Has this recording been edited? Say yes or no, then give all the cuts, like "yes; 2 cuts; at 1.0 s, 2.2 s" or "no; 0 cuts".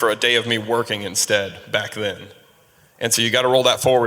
no; 0 cuts